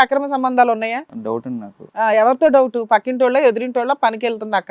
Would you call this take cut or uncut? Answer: cut